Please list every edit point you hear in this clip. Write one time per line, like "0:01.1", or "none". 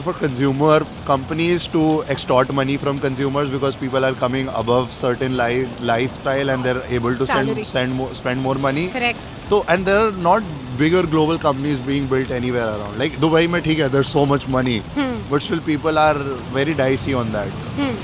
none